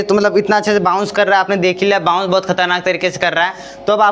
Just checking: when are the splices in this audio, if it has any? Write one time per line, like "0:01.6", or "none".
none